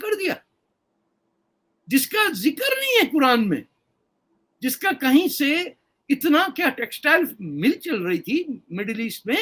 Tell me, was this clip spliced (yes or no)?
no